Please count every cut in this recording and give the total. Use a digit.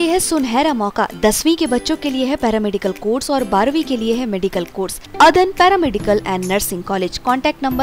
1